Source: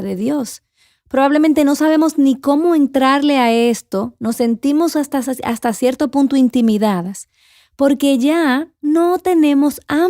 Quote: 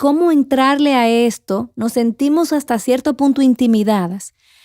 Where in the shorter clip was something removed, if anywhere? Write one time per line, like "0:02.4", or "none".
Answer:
0:02.6